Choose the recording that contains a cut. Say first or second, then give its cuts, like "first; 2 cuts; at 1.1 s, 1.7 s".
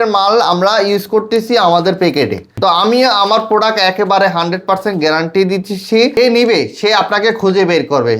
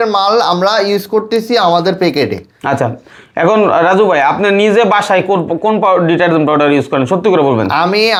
first; 2 cuts; at 2.6 s, 6.2 s